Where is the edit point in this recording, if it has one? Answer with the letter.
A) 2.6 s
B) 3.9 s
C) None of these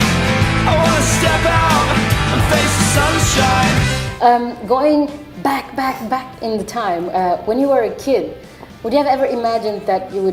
C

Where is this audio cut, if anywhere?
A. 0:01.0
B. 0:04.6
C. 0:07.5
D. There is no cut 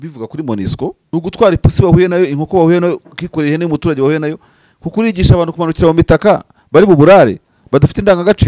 A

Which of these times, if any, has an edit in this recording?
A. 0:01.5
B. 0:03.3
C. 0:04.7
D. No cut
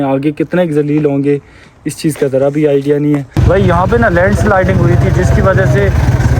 B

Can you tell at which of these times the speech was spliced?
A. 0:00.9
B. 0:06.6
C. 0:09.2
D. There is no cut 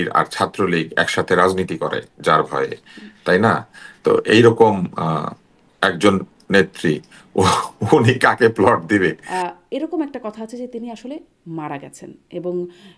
C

